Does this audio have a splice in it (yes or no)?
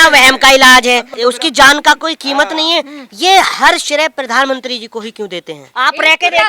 yes